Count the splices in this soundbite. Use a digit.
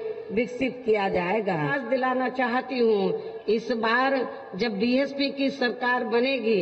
1